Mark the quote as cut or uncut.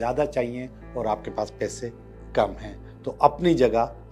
uncut